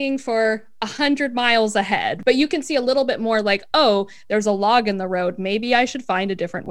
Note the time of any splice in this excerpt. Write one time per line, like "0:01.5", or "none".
0:02.1